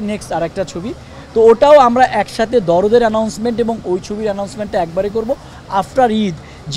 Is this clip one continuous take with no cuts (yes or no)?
yes